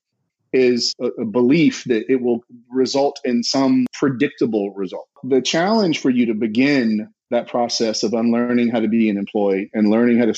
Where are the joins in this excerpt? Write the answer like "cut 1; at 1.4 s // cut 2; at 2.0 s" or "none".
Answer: cut 1; at 0.9 s // cut 2; at 3.9 s // cut 3; at 5.2 s